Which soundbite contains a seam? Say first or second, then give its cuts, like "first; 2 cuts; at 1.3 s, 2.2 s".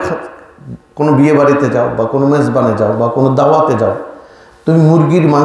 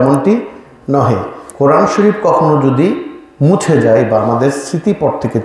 second; 1 cut; at 1.4 s